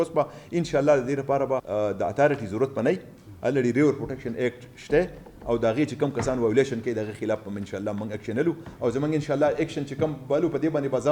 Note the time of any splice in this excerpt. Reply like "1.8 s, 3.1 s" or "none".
1.7 s